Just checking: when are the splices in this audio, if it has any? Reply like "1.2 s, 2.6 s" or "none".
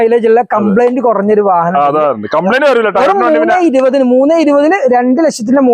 none